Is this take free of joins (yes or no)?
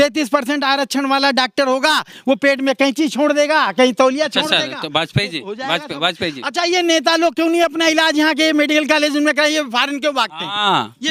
yes